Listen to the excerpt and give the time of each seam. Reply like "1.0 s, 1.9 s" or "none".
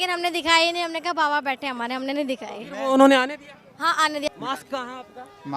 4.3 s